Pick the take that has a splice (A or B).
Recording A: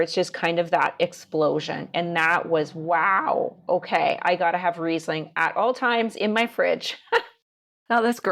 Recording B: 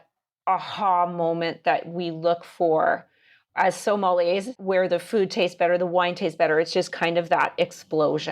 B